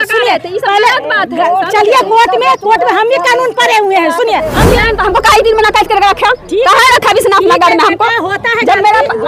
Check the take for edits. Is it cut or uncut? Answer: cut